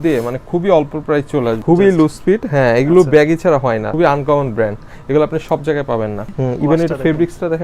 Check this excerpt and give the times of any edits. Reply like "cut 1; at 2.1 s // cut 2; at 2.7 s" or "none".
cut 1; at 1.6 s // cut 2; at 3.9 s // cut 3; at 6.3 s